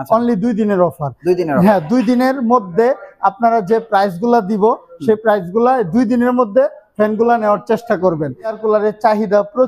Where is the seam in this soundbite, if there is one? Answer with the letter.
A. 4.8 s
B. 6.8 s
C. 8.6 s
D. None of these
C